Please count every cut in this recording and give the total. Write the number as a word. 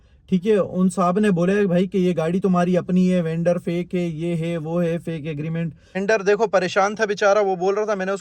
one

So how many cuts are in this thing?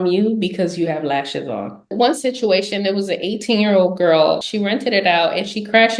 two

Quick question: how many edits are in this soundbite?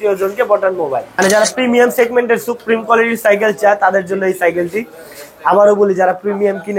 one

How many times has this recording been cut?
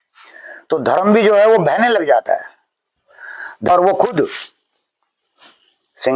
one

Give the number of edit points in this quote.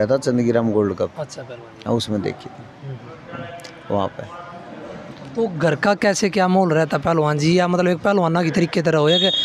zero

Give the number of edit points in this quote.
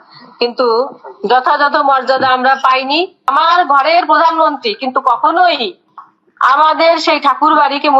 one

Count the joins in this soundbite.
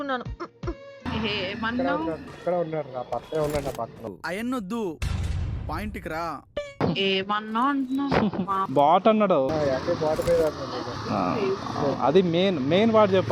five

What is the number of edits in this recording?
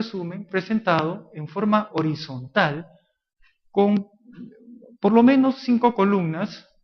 one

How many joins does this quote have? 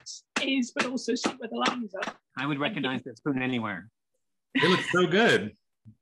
one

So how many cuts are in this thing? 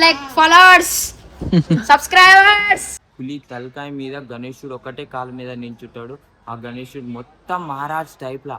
one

